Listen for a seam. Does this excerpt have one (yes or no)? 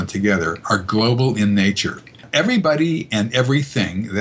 yes